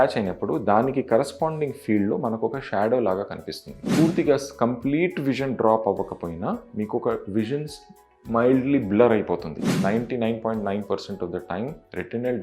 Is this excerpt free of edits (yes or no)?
no